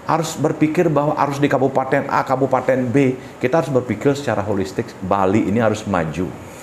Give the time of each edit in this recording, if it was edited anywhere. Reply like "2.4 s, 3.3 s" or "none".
none